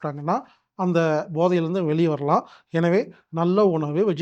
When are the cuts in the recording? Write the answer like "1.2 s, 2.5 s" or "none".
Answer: none